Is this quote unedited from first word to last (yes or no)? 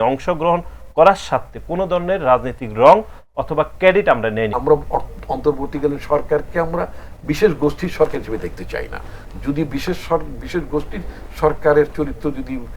no